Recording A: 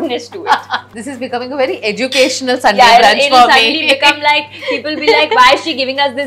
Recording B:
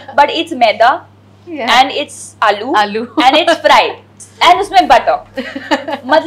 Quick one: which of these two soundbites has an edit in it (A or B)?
A